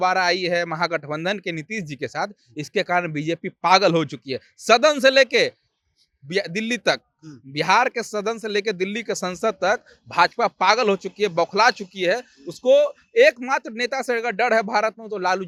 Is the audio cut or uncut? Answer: uncut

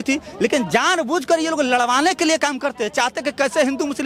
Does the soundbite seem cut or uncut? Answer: uncut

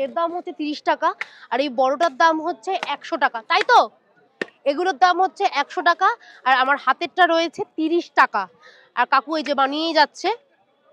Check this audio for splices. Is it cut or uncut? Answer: uncut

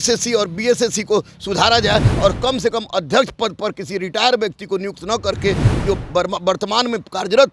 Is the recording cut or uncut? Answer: uncut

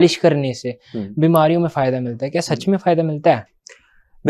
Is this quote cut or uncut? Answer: uncut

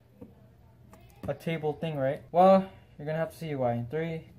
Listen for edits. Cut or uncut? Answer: cut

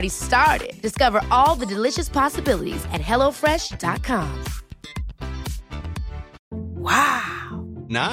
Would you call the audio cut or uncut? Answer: cut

